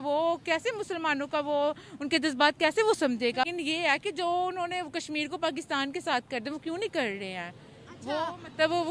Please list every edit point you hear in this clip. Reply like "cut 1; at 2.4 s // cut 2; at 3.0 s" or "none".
cut 1; at 3.5 s